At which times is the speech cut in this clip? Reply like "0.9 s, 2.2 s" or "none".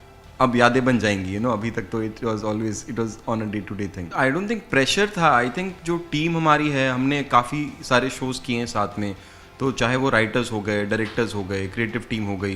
4.1 s

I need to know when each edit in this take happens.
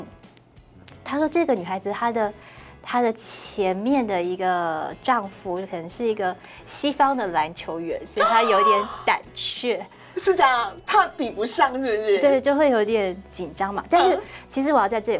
none

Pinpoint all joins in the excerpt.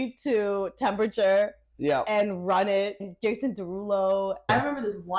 3.0 s, 4.5 s

